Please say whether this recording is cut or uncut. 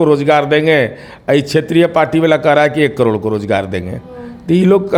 uncut